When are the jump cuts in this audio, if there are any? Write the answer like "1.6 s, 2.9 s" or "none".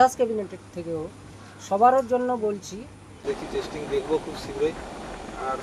3.1 s